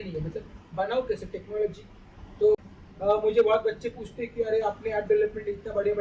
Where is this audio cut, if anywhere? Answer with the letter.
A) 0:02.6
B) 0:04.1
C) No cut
A